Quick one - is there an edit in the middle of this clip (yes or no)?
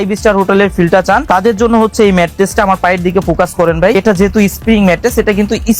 yes